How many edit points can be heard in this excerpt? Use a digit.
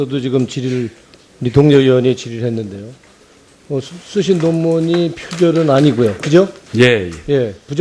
0